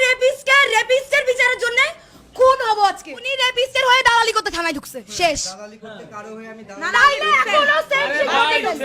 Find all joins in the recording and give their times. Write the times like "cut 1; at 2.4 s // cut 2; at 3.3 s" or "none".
cut 1; at 3.4 s